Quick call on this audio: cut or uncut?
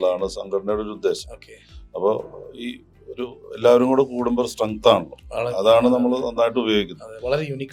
uncut